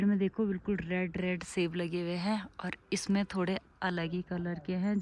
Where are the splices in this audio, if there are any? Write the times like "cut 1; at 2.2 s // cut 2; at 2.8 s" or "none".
none